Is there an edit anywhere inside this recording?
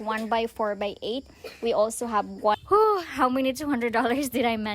yes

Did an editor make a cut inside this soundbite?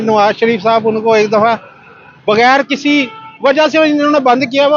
no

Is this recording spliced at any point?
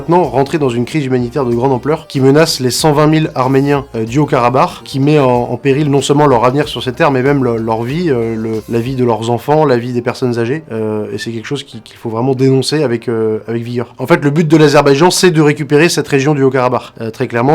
no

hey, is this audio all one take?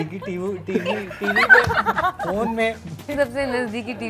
no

